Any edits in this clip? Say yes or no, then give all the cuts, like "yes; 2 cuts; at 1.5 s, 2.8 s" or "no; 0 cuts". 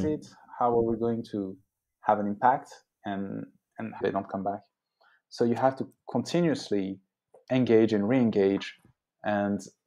yes; 1 cut; at 4.0 s